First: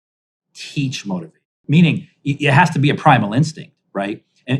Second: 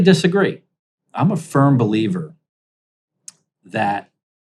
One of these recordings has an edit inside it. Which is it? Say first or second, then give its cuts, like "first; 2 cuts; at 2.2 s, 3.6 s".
first; 1 cut; at 1.6 s